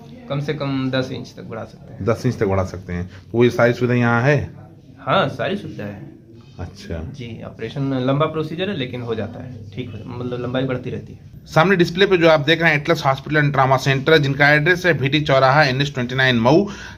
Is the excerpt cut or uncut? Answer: uncut